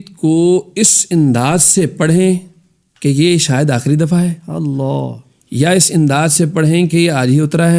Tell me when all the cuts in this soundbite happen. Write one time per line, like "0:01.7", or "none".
none